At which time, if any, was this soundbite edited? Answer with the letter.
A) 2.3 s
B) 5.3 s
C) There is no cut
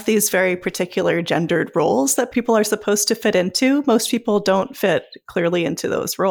A